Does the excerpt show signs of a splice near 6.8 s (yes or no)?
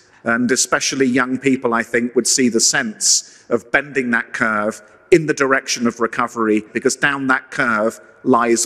yes